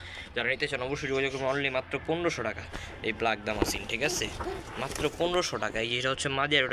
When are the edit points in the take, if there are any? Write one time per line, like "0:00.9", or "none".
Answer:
none